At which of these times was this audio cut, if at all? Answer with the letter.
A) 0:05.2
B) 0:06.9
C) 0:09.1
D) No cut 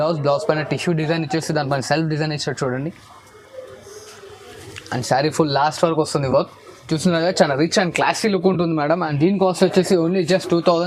D